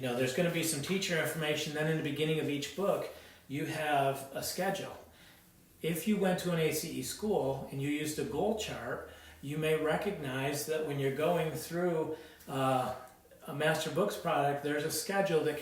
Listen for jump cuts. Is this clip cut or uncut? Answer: uncut